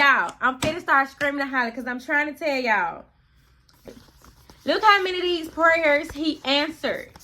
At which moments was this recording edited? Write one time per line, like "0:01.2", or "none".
0:03.9